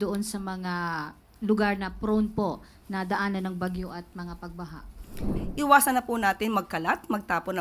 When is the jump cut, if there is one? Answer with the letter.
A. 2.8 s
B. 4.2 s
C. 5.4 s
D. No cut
C